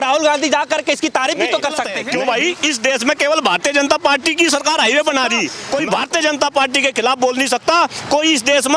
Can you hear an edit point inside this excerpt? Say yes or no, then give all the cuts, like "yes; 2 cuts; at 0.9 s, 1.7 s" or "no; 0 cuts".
yes; 2 cuts; at 2.0 s, 5.6 s